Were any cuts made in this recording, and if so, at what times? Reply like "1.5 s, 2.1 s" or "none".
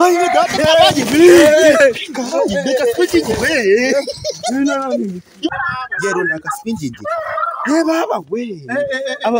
5.5 s